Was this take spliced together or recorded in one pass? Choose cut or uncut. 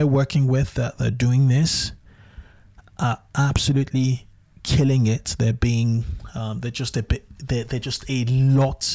uncut